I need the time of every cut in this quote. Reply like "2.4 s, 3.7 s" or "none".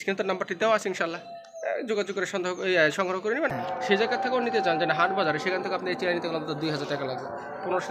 3.5 s